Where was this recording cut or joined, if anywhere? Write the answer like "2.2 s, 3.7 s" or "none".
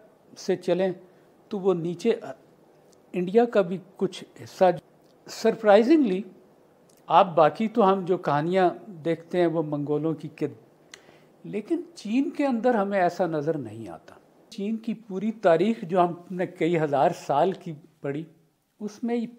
4.8 s, 10.7 s, 14.5 s